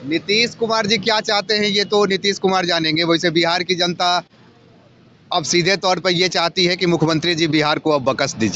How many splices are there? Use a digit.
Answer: 0